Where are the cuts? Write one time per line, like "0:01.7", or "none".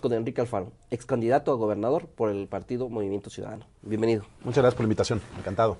none